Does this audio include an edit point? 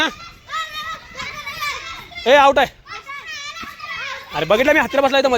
no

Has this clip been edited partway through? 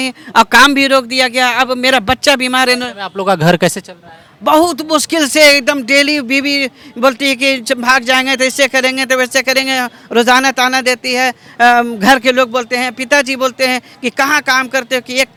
no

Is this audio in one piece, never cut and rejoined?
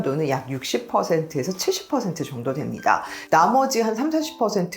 no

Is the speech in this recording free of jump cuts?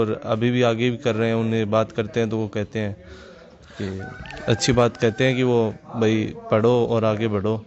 yes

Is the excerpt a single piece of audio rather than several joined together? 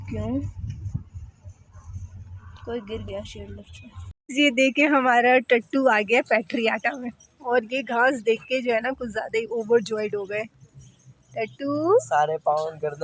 no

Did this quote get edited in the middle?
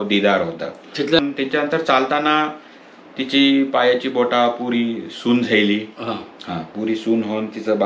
yes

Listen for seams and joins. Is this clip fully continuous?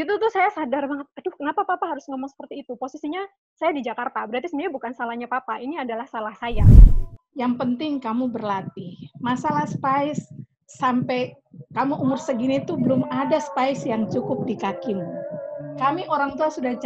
no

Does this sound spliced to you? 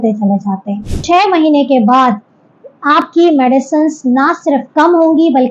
yes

